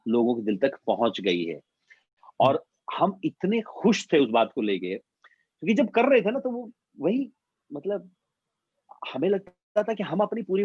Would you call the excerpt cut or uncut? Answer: uncut